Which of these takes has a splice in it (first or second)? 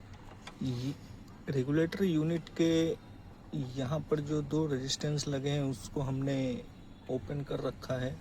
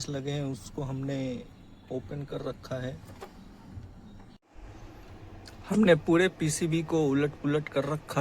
second